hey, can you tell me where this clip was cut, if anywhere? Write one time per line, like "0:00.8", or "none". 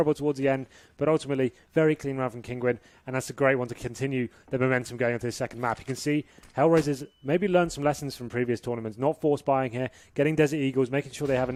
none